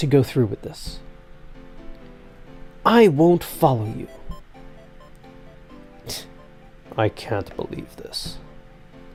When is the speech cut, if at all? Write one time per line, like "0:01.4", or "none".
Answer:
none